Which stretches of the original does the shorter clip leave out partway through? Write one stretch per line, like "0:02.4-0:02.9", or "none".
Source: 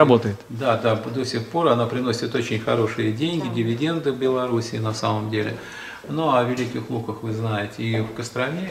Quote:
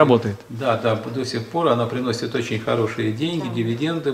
none